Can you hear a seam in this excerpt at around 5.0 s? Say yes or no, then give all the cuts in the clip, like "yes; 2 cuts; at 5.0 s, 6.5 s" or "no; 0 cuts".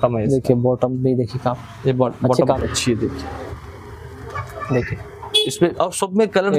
no; 1 cut; at 2.6 s